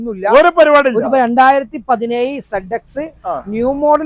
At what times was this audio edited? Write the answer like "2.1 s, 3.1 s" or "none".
1.1 s